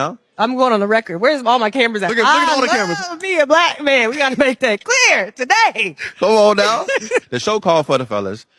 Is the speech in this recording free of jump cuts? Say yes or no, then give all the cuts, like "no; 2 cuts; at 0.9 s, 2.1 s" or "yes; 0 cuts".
no; 1 cut; at 4.3 s